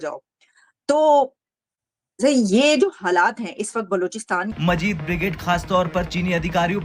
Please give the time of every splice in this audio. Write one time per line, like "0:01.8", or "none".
0:04.5